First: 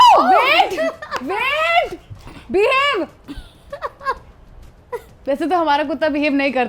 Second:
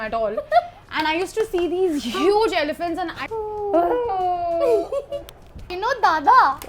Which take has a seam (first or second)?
second